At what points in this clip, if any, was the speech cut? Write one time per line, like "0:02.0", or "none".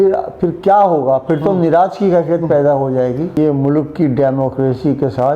0:03.4